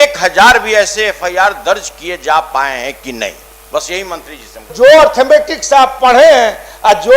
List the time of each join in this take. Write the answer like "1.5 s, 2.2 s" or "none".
4.7 s